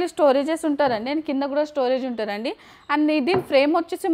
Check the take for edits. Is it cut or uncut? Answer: uncut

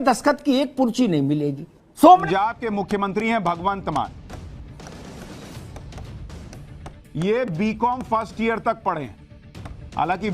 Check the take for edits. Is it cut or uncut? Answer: cut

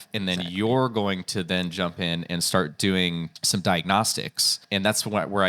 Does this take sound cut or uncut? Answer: cut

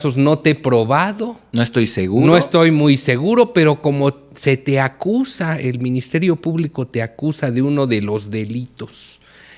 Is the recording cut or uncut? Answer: uncut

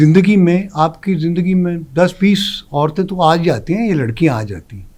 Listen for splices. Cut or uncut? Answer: uncut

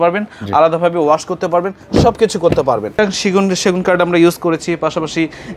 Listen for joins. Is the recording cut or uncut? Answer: cut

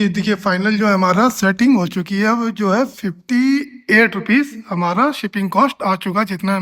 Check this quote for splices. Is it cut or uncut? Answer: uncut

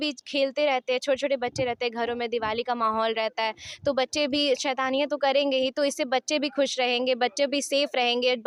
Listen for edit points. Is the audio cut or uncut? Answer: uncut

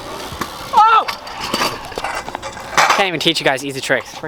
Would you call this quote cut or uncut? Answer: uncut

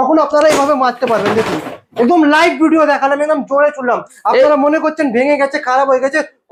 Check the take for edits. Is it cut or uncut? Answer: uncut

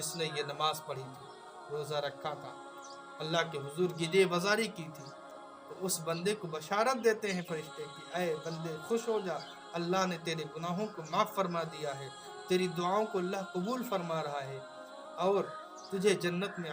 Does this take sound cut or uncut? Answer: uncut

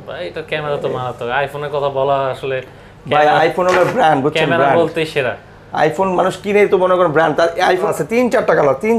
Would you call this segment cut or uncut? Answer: cut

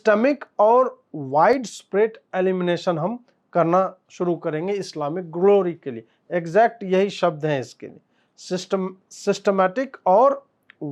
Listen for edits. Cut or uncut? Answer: uncut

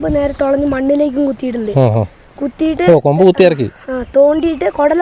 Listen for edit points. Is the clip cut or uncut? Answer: uncut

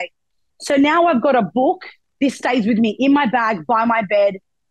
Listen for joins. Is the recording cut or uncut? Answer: cut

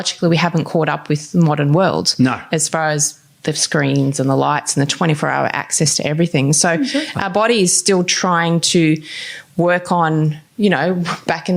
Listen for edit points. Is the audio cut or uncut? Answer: uncut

